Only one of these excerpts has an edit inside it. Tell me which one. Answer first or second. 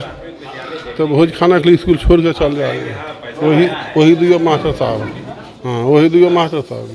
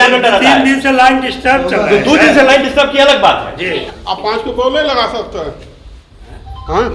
second